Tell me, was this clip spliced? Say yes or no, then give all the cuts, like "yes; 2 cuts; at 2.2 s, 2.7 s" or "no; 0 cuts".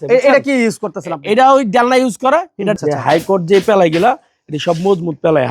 yes; 1 cut; at 2.8 s